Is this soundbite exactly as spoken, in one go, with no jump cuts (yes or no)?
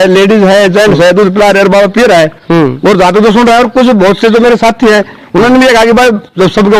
yes